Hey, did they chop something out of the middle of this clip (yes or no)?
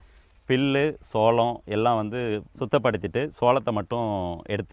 yes